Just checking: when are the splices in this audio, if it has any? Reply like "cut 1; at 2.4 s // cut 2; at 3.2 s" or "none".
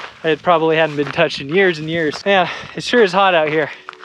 cut 1; at 2.2 s